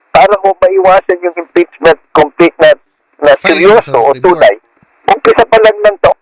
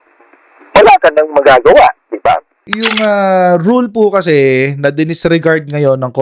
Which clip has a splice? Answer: second; 1 cut; at 2.6 s

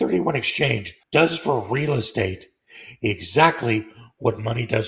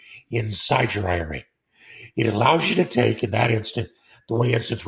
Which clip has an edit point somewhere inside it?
first; 1 cut; at 0.9 s

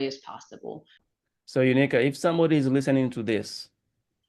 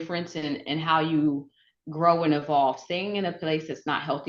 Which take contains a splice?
first; 1 cut; at 1.0 s

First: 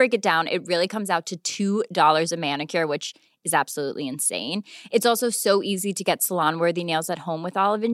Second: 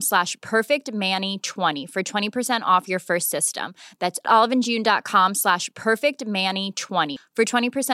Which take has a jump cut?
second; 1 cut; at 1.8 s

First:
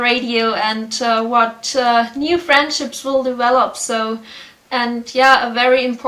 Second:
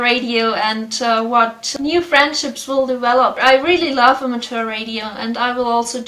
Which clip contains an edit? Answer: second; 2 cuts; at 1.7 s, 3.4 s

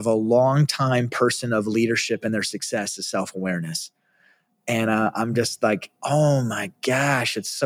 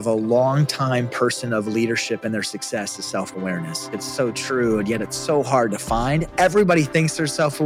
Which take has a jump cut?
second; 1 cut; at 4.0 s

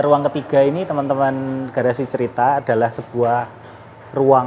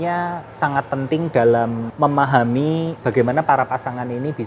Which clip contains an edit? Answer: second; 2 cuts; at 1.8 s, 3.0 s

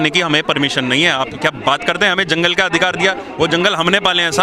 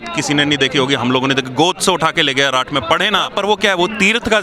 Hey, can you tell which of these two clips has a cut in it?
second; 1 cut; at 3.3 s

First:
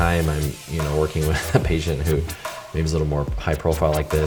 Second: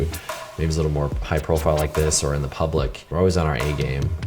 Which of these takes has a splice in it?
second; 1 cut; at 3.0 s

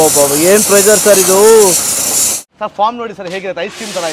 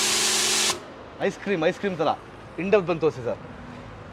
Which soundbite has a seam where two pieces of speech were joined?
first; 1 cut; at 2.5 s

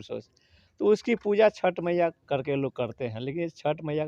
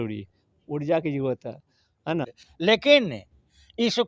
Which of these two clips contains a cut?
second; 1 cut; at 2.3 s

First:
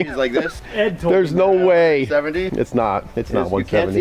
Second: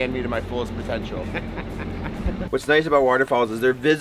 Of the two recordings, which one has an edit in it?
second; 1 cut; at 2.3 s

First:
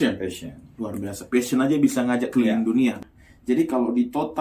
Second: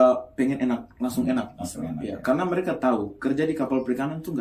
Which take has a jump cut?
first; 1 cut; at 3.0 s

